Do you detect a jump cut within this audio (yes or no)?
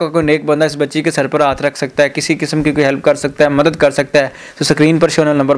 no